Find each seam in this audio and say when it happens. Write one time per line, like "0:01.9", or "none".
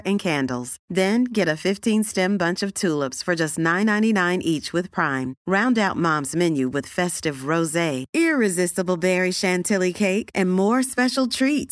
none